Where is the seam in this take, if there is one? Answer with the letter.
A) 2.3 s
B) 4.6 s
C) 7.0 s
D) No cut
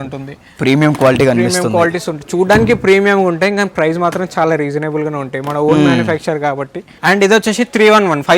C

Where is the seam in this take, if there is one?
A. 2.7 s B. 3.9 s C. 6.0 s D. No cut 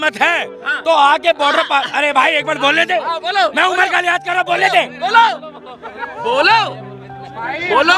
C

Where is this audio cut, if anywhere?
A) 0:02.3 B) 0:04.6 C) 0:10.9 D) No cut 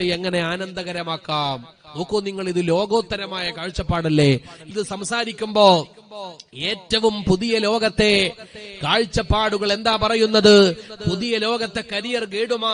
B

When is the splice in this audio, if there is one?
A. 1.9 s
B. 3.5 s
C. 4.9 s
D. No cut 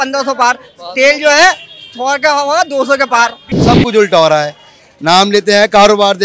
B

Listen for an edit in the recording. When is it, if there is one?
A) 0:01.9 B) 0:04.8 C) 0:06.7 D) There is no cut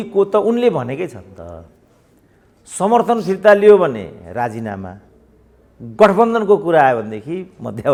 D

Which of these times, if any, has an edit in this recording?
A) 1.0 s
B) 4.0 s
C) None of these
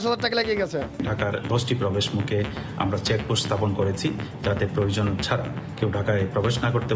A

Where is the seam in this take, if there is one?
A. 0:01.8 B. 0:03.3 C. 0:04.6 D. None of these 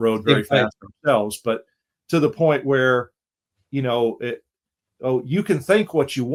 D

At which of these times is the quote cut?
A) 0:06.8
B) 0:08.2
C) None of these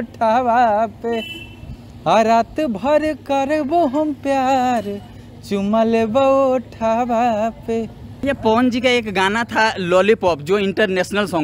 B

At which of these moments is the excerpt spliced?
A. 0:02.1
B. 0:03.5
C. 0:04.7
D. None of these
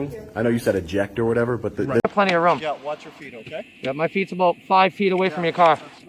A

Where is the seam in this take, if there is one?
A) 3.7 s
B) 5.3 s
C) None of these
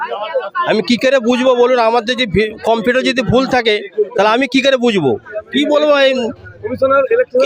B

